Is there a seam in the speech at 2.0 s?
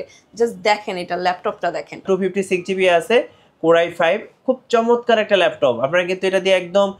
yes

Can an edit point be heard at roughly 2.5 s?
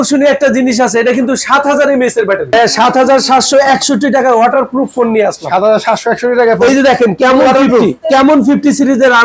yes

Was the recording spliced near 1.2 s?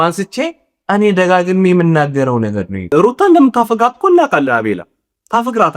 no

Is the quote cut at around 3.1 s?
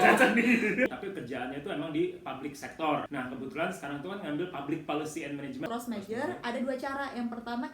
yes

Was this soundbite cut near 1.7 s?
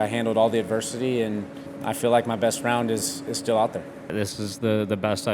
yes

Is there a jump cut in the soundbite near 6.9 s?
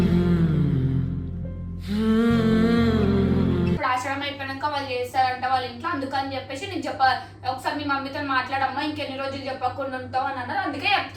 no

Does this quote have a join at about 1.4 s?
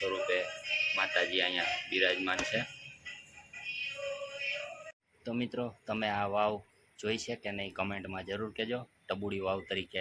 no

